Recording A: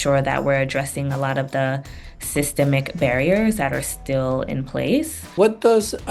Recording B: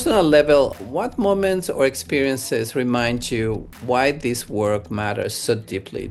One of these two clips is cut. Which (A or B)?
A